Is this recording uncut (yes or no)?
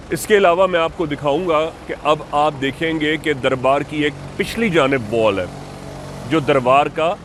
yes